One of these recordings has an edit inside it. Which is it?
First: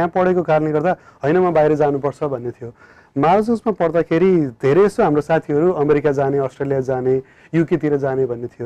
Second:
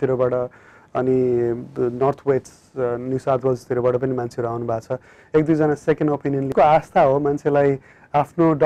second; 1 cut; at 6.5 s

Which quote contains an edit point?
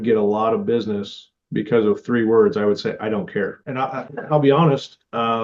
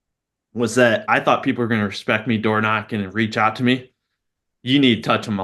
first; 1 cut; at 3.6 s

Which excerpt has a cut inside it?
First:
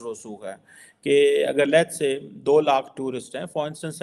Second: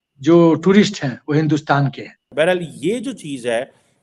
second; 1 cut; at 2.2 s

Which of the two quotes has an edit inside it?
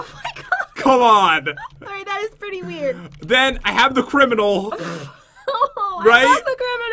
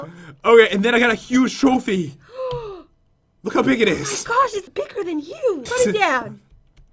second; 1 cut; at 5.2 s

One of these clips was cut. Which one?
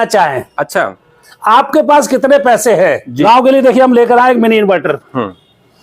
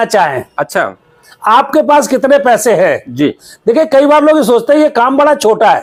first; 1 cut; at 3.1 s

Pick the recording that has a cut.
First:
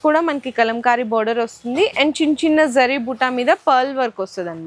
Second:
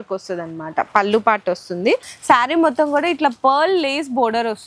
second; 1 cut; at 2.1 s

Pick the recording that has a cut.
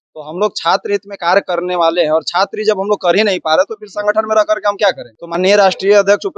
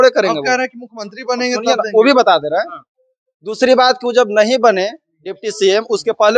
first; 1 cut; at 5.1 s

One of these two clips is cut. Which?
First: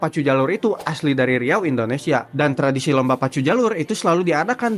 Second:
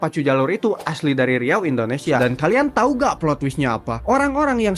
second; 1 cut; at 2.2 s

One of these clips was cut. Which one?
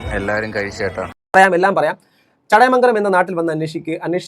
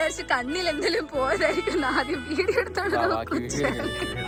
first; 1 cut; at 1.2 s

